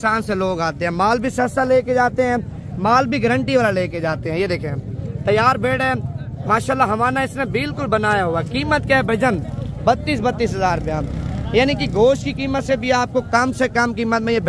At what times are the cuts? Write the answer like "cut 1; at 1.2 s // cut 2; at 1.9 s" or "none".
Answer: none